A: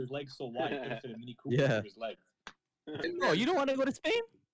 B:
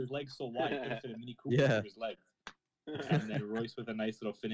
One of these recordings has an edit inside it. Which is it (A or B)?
A